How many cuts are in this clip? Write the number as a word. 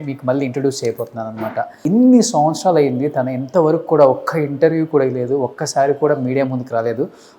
one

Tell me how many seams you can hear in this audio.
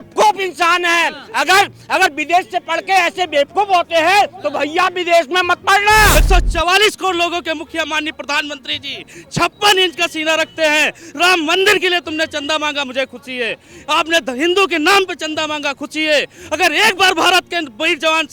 one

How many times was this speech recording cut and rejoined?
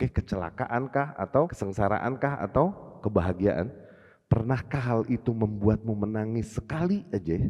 one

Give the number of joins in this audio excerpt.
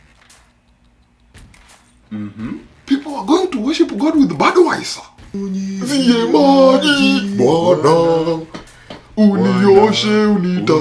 one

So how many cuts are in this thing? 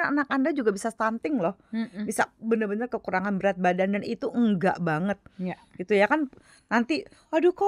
zero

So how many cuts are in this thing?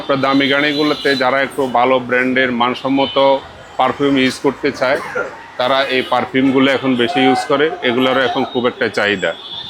zero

